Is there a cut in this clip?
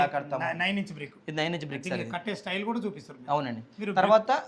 no; 0 cuts

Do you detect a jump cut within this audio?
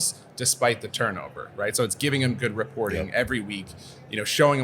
no; 0 cuts

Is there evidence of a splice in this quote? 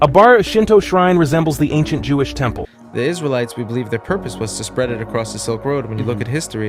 yes; 1 cut; at 2.8 s

